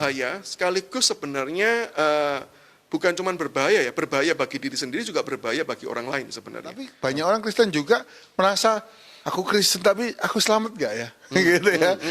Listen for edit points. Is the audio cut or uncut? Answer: cut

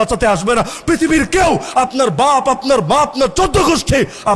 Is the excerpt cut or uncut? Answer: uncut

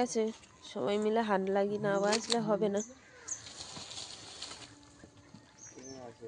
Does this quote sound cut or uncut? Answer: cut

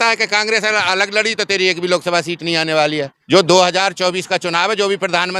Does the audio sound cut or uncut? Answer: cut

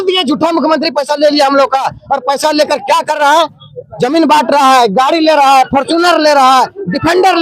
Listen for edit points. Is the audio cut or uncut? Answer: uncut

